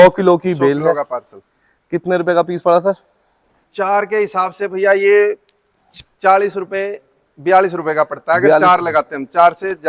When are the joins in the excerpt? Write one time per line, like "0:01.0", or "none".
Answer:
none